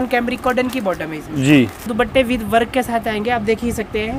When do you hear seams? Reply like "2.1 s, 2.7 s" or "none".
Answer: 1.9 s